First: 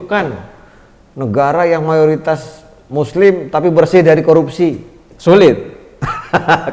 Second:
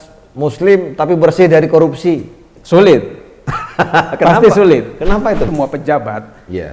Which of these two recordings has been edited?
second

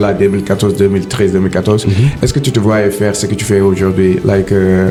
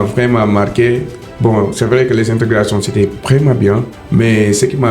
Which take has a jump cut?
second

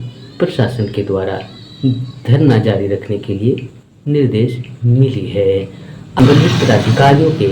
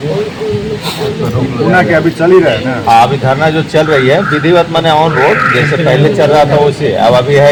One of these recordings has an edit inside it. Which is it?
first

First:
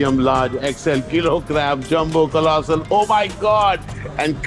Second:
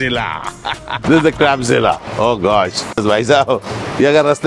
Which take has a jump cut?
second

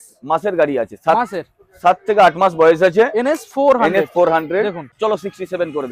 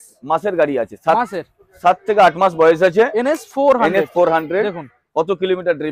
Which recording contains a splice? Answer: first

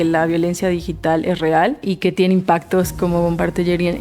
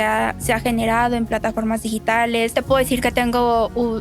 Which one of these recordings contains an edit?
second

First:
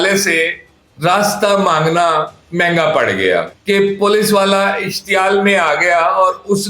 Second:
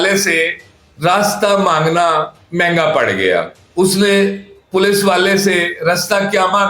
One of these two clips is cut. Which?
first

